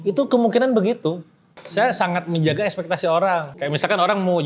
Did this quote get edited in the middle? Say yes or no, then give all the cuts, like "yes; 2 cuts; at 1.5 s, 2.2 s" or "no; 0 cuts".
yes; 2 cuts; at 1.6 s, 3.5 s